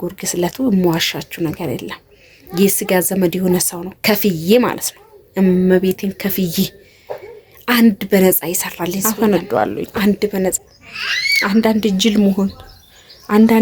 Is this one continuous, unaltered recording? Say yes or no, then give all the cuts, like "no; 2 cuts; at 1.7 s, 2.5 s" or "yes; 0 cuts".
no; 3 cuts; at 9.1 s, 9.9 s, 10.7 s